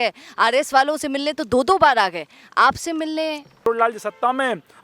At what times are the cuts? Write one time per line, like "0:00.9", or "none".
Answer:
0:03.7